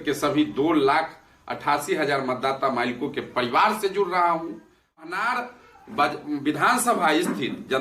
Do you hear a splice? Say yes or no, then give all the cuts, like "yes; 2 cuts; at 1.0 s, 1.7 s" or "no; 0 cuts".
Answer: yes; 1 cut; at 5.0 s